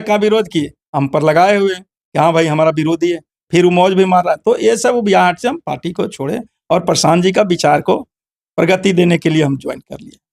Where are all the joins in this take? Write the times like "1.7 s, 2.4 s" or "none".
none